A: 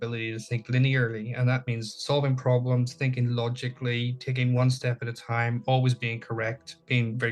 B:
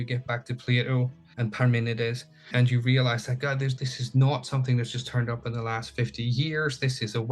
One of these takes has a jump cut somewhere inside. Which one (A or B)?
B